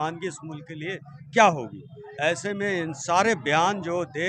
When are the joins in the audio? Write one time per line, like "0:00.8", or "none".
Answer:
none